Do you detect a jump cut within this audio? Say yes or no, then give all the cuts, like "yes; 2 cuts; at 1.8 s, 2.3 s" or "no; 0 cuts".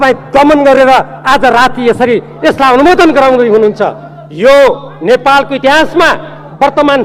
no; 0 cuts